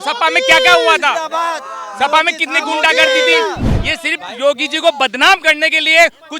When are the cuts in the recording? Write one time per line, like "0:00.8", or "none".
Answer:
0:03.7